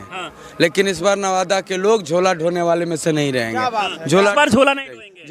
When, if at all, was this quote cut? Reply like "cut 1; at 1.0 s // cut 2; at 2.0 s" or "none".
none